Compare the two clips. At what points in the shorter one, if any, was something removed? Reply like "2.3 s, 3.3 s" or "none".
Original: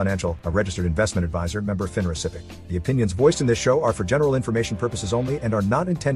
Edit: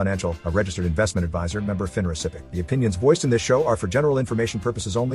2.4 s